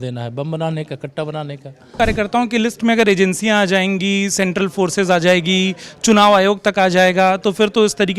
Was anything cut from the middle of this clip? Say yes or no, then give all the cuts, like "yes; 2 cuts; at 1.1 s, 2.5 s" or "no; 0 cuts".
yes; 1 cut; at 1.9 s